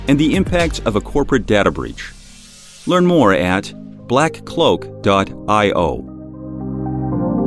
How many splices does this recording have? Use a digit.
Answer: 1